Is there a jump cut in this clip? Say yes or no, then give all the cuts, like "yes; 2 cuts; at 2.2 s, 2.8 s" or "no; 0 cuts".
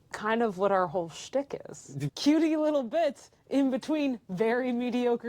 yes; 1 cut; at 2.1 s